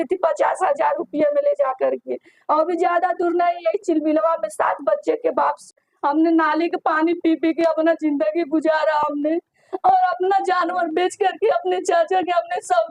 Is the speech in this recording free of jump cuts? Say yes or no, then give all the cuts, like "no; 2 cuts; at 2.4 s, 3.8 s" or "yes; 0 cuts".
no; 1 cut; at 5.7 s